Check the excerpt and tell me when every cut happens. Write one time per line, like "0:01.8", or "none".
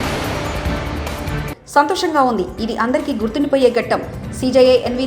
none